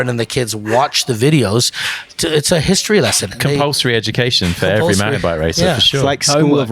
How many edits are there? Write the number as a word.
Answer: zero